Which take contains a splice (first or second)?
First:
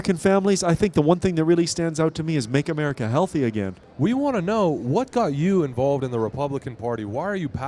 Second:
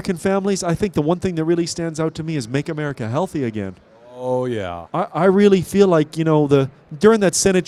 first